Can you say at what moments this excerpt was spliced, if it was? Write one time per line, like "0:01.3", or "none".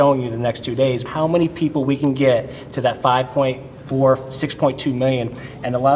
0:01.0